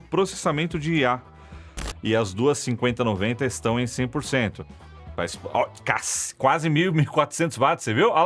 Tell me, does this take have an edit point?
yes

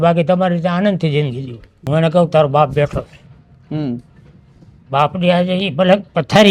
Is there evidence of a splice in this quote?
yes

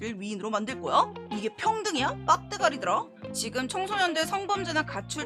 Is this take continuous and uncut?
no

